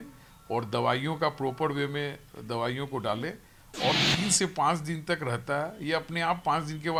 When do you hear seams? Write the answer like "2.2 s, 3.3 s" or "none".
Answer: none

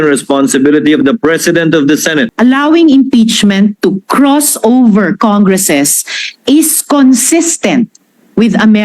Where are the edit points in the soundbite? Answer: 2.3 s

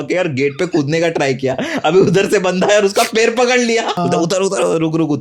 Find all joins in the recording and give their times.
4.0 s

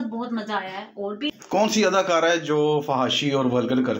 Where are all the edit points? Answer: 1.3 s

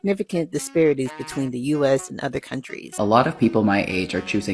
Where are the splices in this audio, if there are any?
3.0 s

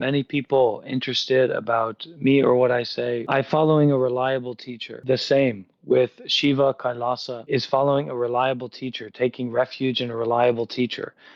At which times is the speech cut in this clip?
3.2 s, 4.9 s, 7.3 s

